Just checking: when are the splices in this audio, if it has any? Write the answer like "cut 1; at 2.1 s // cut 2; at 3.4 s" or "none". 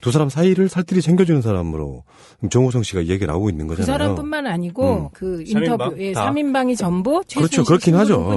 cut 1; at 7.3 s